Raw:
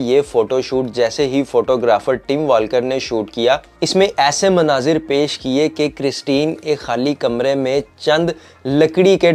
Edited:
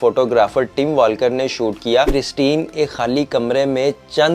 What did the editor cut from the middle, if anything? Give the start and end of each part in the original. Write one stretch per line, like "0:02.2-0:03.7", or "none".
0:03.6-0:06.0